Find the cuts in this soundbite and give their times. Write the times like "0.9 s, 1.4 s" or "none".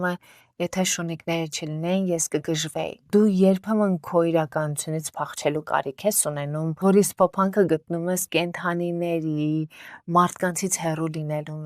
none